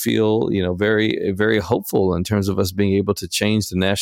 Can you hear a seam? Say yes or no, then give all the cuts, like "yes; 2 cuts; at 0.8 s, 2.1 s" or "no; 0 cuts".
no; 0 cuts